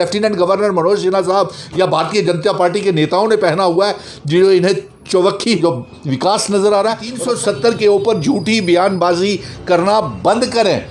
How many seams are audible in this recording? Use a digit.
2